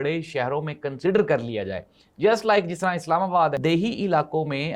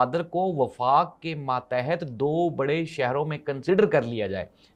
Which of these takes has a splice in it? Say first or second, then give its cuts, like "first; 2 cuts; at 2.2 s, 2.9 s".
first; 1 cut; at 3.6 s